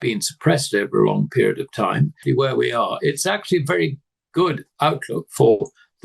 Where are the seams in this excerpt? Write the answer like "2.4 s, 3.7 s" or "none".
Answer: 2.2 s